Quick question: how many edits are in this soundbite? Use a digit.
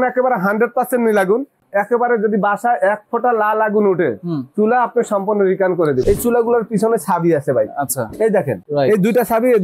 3